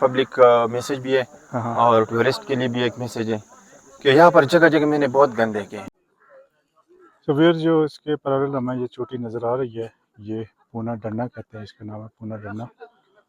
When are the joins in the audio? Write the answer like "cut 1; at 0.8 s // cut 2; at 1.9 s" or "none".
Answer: cut 1; at 5.8 s